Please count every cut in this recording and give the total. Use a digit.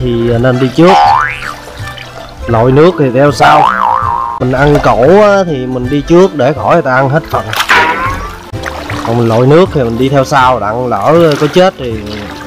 2